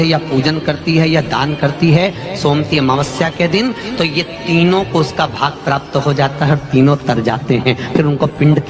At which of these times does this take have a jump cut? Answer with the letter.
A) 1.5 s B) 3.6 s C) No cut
C